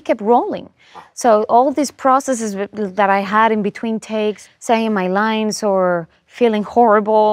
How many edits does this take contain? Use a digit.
1